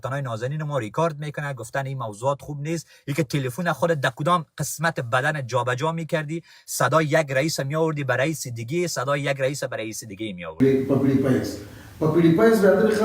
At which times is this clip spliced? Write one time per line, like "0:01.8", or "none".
0:10.6